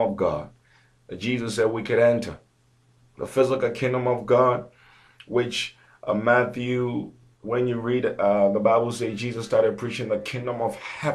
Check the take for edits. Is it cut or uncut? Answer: uncut